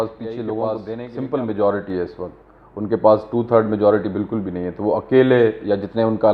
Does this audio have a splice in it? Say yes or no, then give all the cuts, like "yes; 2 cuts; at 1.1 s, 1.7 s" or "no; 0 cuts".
yes; 1 cut; at 0.9 s